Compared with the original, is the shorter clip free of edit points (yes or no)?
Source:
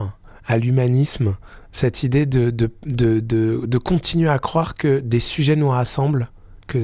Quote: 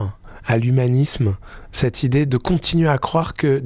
no